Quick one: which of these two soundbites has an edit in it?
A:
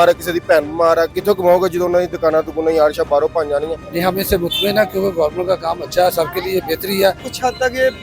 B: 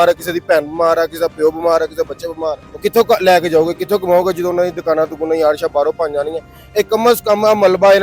A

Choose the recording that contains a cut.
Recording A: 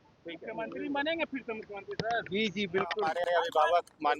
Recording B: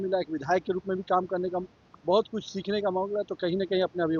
A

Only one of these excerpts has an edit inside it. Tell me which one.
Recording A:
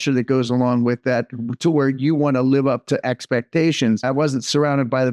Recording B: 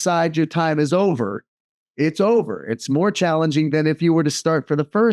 A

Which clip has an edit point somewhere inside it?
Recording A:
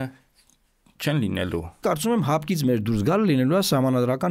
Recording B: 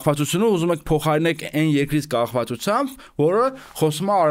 A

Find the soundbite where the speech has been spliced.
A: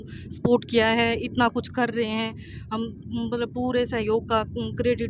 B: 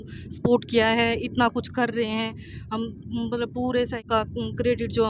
B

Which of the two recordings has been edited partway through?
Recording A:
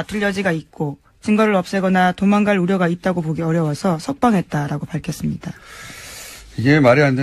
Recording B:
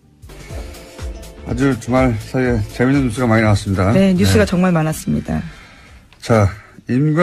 B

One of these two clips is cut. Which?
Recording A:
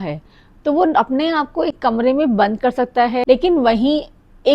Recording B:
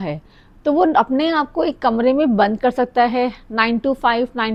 A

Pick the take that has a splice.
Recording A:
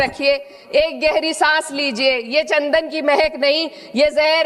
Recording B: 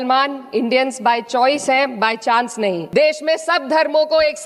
B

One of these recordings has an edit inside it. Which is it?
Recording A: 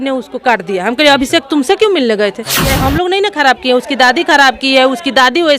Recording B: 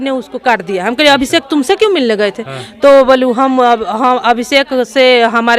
A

